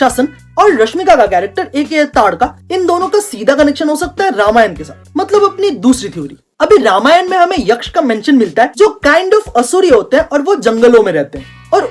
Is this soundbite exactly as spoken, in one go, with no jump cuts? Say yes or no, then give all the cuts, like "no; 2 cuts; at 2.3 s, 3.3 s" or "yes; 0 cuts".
yes; 0 cuts